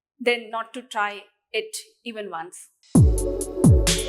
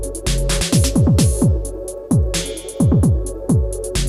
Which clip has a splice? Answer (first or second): first